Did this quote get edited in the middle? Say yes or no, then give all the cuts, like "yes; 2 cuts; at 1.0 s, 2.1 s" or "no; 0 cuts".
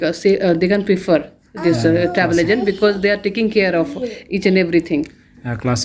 no; 0 cuts